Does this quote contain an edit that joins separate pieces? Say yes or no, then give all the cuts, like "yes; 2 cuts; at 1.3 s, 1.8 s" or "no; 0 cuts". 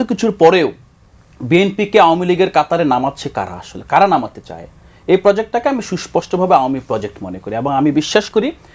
no; 0 cuts